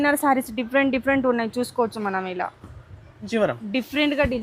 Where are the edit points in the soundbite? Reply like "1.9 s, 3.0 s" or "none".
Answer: 3.3 s